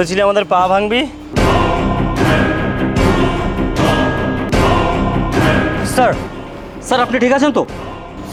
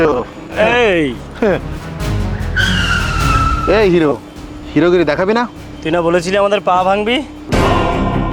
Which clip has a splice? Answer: second; 1 cut; at 1.7 s

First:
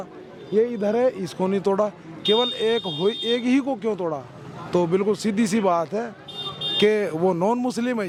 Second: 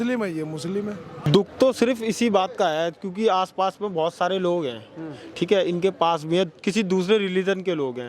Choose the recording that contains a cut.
second; 1 cut; at 1.3 s

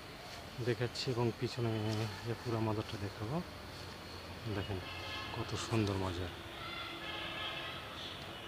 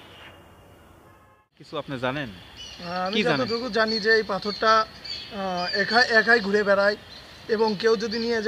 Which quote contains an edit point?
second; 1 cut; at 1.6 s

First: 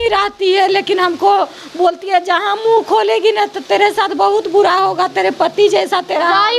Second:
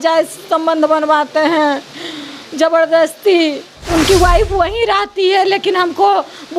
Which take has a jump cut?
second; 1 cut; at 3.7 s

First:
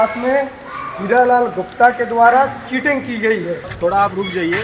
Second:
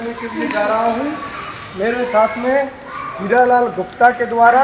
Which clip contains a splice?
first; 1 cut; at 3.7 s

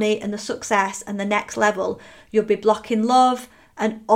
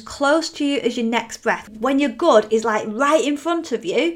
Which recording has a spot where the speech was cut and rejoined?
second; 1 cut; at 1.6 s

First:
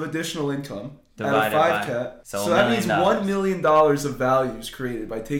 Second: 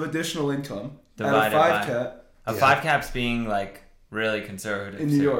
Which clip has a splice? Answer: first; 1 cut; at 2.2 s

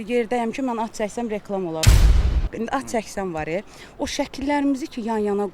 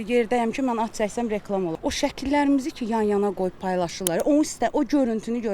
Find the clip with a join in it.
second; 1 cut; at 1.8 s

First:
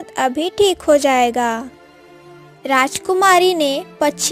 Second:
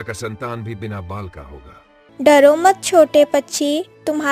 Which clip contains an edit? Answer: second; 1 cut; at 2.1 s

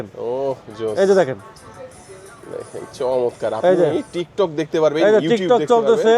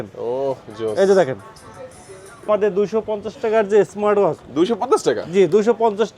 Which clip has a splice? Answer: second; 1 cut; at 2.5 s

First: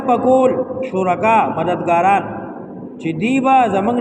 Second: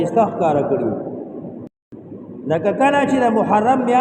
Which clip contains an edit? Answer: second; 1 cut; at 1.8 s

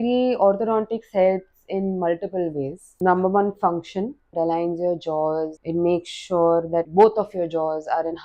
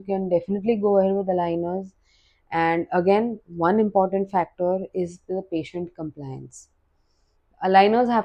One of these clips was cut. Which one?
first; 4 cuts; at 3.0 s, 4.3 s, 5.6 s, 6.9 s

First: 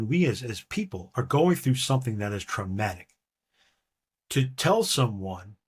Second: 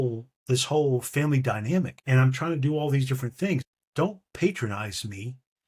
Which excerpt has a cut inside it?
second; 2 cuts; at 2.0 s, 3.8 s

